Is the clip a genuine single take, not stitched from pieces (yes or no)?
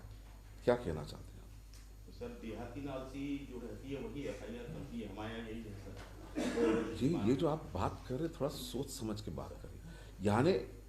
yes